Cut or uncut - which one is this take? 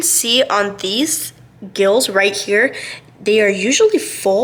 uncut